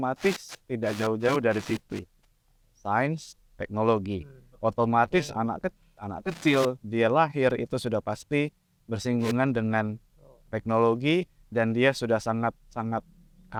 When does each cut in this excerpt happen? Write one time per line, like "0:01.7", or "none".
none